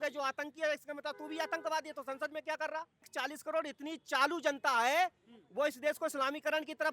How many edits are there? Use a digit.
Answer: 1